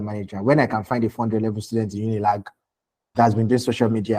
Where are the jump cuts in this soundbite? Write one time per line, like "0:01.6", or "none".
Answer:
none